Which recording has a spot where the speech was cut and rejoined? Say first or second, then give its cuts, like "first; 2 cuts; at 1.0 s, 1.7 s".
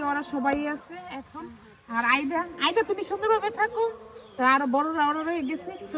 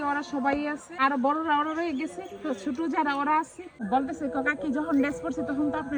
second; 2 cuts; at 1.0 s, 3.7 s